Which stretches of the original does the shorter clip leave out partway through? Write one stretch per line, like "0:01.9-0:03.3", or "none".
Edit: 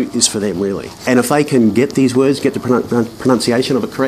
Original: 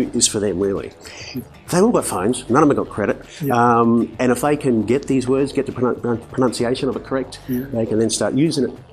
0:01.0-0:04.1